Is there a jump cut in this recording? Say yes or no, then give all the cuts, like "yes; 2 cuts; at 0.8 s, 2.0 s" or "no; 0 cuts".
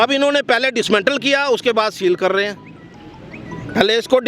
no; 0 cuts